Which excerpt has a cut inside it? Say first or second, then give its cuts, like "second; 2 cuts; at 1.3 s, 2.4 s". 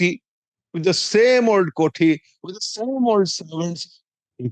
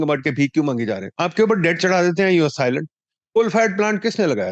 second; 1 cut; at 1.1 s